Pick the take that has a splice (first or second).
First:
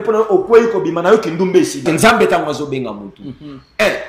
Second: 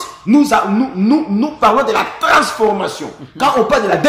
first